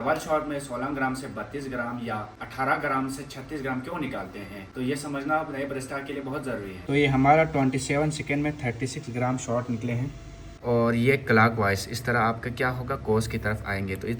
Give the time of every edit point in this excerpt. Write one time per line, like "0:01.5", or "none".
0:06.8
0:10.6